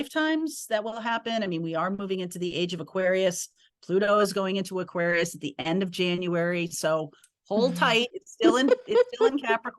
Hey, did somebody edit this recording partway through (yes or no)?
no